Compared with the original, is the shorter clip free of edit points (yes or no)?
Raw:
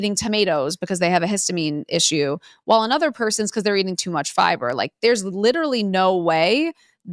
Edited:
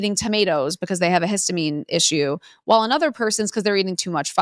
yes